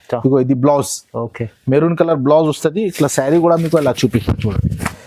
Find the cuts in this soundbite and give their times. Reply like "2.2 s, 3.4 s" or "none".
none